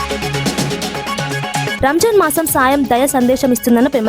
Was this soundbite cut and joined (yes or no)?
yes